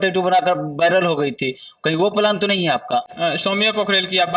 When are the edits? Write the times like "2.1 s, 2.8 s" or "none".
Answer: none